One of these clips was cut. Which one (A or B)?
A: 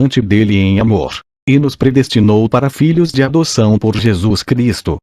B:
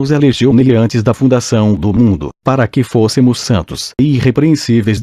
A